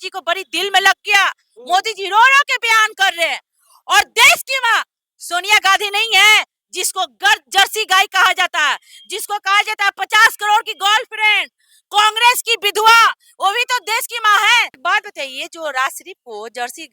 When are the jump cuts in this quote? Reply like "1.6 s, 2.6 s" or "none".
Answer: 14.8 s